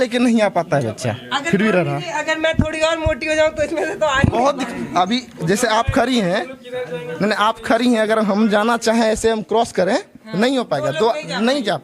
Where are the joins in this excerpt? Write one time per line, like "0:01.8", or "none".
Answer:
none